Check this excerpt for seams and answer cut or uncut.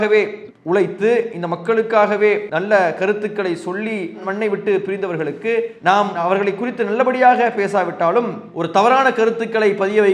cut